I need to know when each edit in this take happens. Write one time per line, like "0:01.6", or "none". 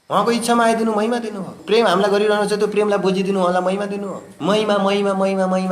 0:01.5
0:04.3